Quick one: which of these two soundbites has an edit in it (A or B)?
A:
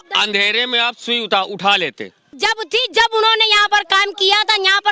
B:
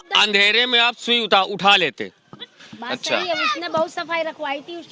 A